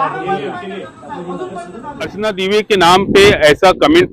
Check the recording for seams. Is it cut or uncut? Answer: cut